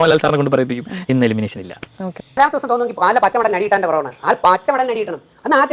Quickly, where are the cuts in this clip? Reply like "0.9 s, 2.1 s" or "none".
2.1 s